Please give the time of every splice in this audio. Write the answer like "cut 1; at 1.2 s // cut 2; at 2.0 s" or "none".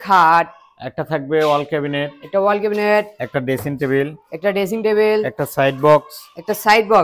none